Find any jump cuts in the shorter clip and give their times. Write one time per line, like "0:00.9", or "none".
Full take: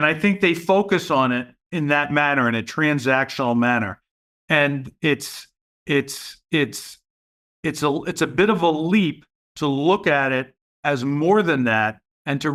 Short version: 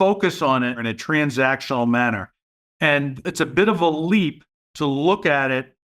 0:00.9
0:03.2